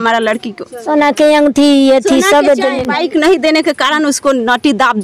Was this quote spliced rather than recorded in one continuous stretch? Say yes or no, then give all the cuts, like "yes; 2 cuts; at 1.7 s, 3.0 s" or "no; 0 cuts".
yes; 1 cut; at 2.8 s